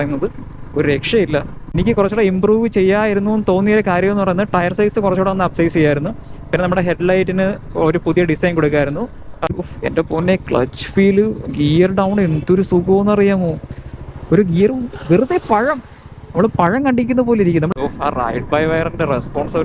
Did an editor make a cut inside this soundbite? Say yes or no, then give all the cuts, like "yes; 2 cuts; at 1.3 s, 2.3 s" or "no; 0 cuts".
yes; 3 cuts; at 1.8 s, 9.5 s, 17.8 s